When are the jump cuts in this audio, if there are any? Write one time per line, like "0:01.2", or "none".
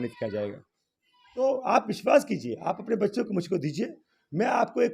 0:01.4